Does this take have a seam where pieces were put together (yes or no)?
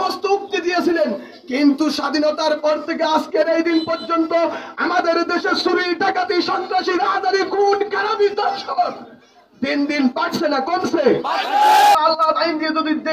yes